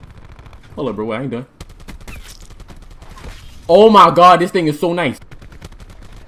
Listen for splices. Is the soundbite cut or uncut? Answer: cut